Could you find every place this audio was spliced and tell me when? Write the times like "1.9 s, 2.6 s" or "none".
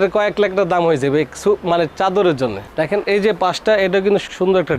2.7 s